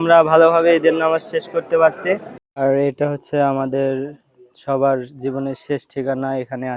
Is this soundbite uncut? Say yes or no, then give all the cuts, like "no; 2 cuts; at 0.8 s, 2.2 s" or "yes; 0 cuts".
no; 1 cut; at 2.7 s